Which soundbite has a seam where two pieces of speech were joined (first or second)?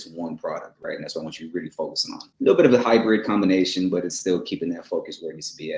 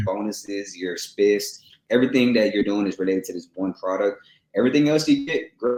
first